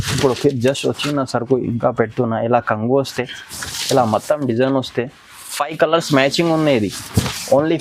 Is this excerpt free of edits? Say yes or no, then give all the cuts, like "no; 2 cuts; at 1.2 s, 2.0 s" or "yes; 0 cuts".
yes; 0 cuts